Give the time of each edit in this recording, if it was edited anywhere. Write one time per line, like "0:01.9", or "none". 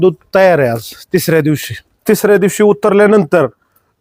0:01.9